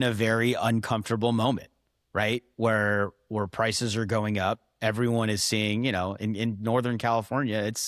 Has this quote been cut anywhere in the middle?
no; 0 cuts

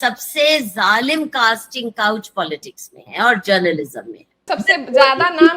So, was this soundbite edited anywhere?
yes; 1 cut; at 4.3 s

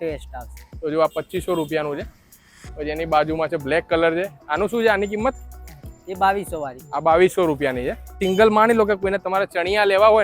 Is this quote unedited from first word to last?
no; 1 cut; at 8.2 s

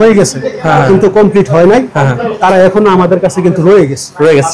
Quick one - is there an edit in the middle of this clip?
no; 0 cuts

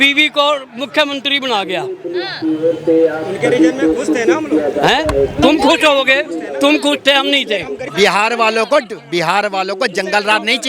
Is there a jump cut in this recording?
yes; 1 cut; at 7.9 s

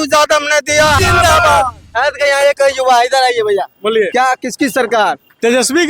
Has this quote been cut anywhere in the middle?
yes; 1 cut; at 1.0 s

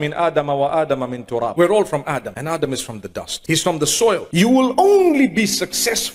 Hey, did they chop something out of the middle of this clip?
yes; 4 cuts; at 1.5 s, 2.3 s, 3.3 s, 4.7 s

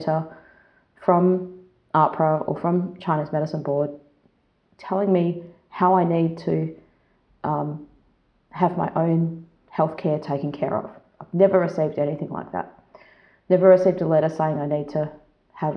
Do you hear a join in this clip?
no; 0 cuts

